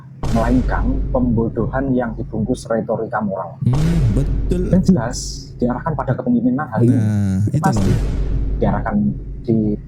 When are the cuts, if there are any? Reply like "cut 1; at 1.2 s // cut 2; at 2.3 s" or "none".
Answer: none